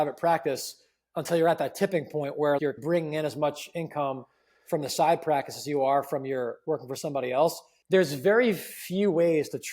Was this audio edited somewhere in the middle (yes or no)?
yes